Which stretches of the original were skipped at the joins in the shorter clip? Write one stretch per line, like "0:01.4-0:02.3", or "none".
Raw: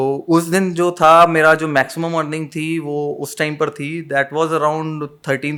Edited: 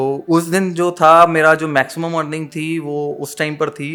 none